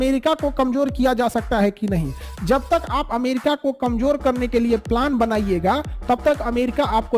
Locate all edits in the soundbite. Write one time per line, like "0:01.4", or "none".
none